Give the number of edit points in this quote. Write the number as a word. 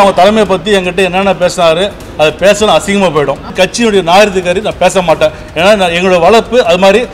one